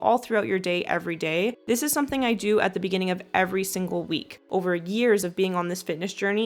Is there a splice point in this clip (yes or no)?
yes